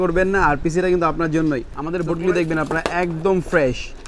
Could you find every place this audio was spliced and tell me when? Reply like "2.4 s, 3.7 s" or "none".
1.8 s